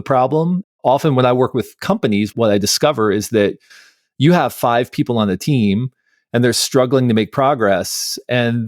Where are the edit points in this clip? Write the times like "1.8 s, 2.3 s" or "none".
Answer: 2.3 s